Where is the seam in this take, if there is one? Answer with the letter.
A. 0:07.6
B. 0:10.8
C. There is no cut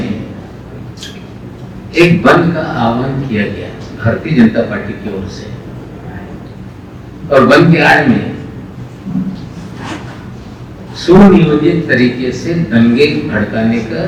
C